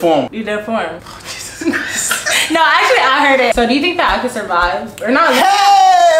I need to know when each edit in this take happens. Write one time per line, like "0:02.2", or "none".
0:03.5